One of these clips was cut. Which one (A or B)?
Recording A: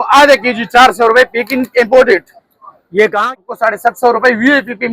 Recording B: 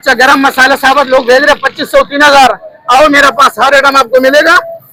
A